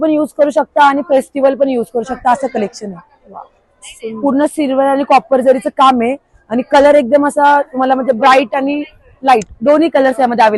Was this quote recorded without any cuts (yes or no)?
yes